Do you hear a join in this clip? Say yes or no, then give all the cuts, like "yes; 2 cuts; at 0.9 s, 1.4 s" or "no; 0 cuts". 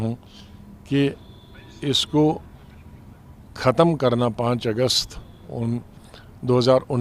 no; 0 cuts